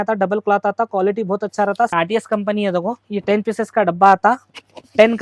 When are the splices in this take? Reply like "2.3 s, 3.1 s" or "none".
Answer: 1.9 s, 3.0 s